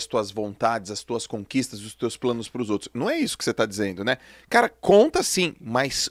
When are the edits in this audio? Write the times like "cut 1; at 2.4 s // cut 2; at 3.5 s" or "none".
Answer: none